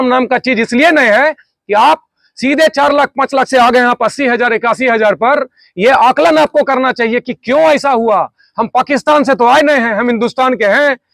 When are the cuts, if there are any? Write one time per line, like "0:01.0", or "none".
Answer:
0:08.4